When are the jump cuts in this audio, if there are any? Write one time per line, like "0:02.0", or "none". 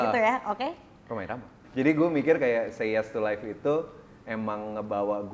0:01.0